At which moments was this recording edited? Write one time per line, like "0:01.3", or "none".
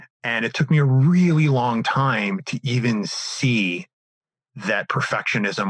none